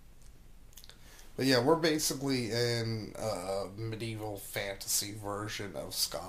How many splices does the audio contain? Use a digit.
1